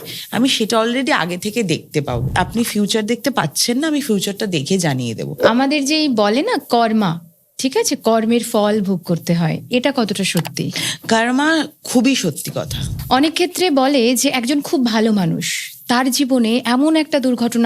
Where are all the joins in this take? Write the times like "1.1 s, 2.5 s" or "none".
2.3 s, 5.3 s, 12.8 s